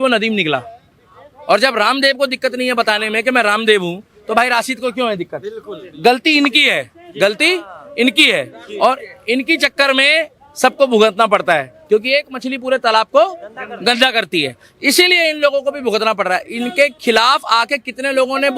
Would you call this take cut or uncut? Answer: uncut